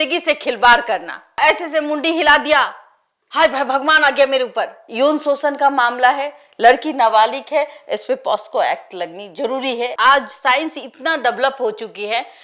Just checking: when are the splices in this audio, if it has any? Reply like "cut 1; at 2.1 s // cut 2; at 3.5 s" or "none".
cut 1; at 1.4 s // cut 2; at 4.8 s // cut 3; at 9.9 s